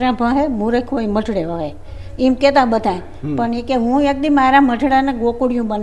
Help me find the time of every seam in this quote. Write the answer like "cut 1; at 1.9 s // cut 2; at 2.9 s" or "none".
none